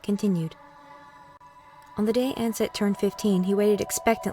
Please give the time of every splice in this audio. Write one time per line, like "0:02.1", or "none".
0:02.9